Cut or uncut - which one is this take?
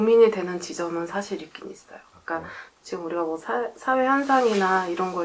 uncut